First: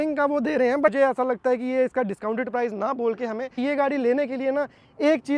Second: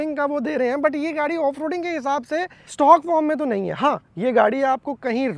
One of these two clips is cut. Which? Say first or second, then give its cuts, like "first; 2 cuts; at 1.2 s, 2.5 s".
first; 2 cuts; at 0.9 s, 3.6 s